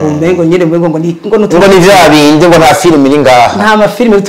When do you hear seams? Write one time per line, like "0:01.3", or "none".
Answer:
none

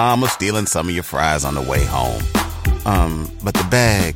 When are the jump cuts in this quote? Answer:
none

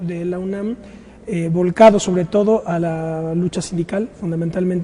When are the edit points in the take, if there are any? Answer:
none

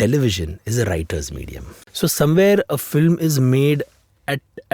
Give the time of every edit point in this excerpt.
0:01.8

